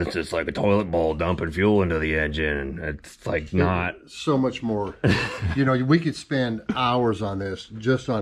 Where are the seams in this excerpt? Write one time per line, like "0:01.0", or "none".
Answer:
none